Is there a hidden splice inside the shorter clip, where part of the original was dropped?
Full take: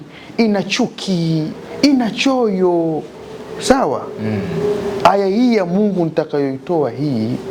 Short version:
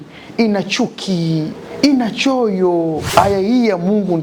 yes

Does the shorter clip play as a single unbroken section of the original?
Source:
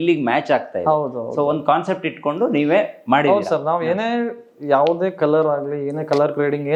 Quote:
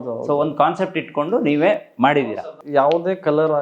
no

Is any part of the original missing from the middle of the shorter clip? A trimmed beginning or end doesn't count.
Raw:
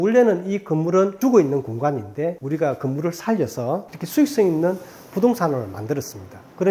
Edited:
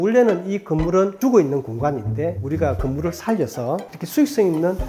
no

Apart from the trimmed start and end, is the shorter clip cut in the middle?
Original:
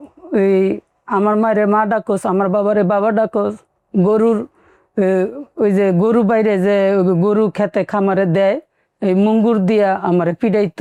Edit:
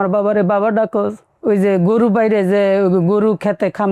yes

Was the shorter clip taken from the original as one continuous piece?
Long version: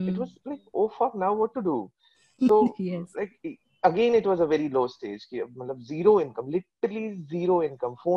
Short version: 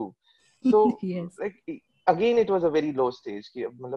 yes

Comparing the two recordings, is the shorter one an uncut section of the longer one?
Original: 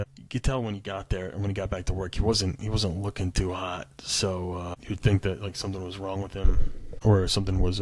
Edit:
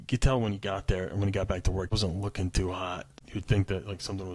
no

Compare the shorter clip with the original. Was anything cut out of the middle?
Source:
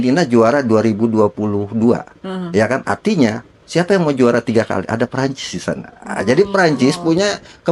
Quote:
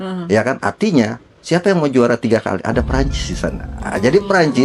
no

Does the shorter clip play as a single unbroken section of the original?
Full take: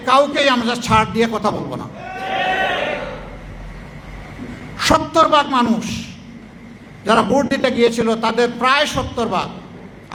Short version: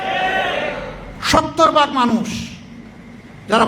no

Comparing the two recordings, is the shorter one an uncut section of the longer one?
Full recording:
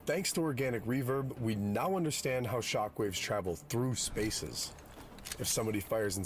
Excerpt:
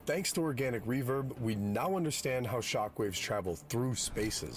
yes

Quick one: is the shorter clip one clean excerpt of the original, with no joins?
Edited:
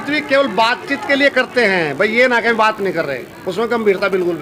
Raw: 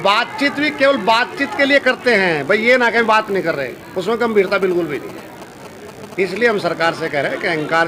yes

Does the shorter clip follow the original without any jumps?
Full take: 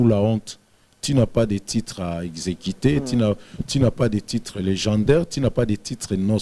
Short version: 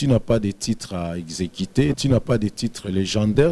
no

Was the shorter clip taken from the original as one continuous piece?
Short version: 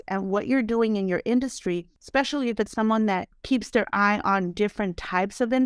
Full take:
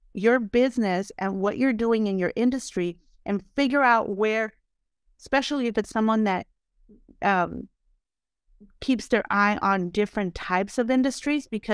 no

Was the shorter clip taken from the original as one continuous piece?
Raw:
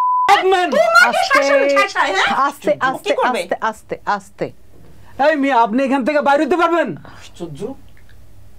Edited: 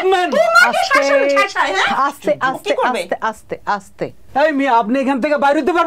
no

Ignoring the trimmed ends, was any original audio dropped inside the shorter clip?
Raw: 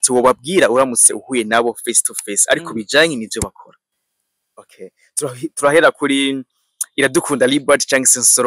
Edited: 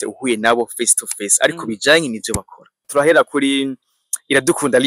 yes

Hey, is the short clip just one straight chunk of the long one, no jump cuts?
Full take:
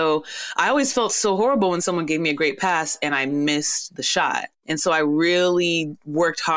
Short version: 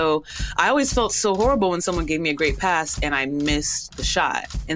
yes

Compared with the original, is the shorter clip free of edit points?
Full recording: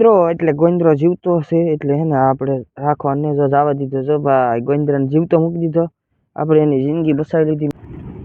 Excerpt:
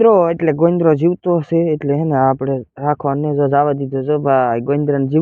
yes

